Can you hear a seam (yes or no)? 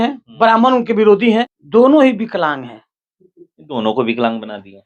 yes